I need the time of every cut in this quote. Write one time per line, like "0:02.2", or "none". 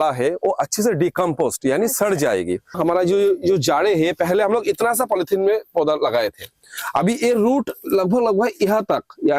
0:02.7